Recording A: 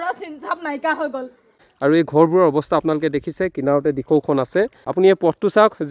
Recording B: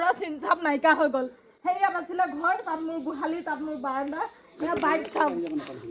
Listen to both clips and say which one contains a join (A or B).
A